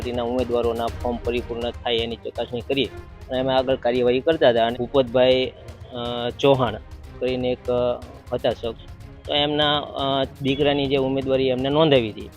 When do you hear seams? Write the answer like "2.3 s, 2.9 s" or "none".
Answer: 4.7 s